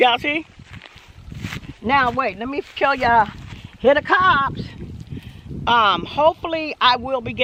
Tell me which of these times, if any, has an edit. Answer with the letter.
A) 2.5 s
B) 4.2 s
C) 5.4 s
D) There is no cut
D